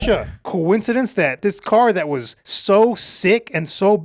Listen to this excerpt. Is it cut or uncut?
cut